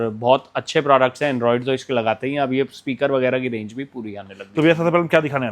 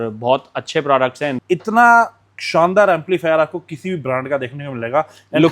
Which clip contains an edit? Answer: second; 1 cut; at 1.4 s

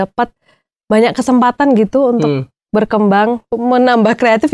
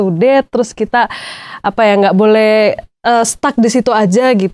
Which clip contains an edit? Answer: first; 1 cut; at 3.5 s

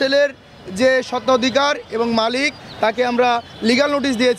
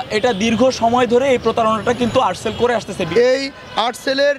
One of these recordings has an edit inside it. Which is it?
second; 1 cut; at 3.1 s

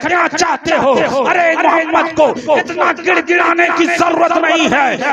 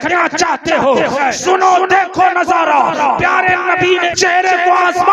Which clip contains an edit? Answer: second; 2 cuts; at 1.1 s, 4.1 s

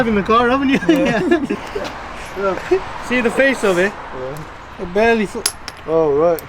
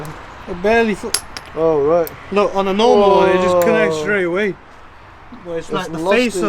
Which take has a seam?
first; 1 cut; at 1.5 s

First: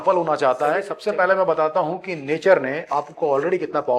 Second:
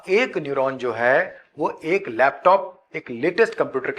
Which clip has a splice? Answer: first; 1 cut; at 0.9 s

